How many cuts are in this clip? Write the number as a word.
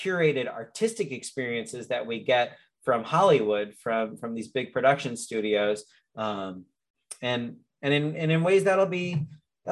zero